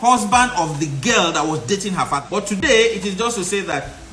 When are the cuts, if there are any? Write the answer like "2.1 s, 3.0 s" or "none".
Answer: 2.2 s